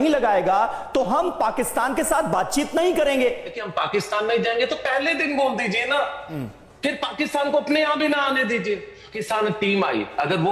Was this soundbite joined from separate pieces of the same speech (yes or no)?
yes